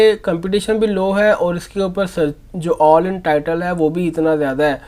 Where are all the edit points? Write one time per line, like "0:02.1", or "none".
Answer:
none